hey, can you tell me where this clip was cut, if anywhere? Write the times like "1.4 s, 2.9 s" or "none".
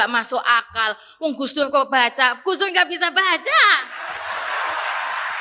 none